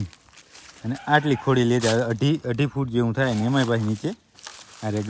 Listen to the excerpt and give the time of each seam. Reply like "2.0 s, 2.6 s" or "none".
none